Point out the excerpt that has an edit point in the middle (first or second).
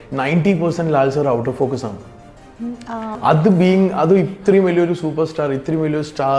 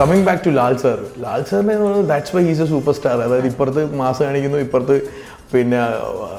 first